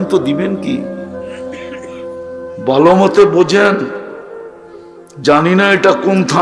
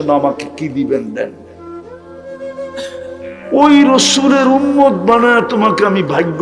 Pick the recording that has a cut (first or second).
second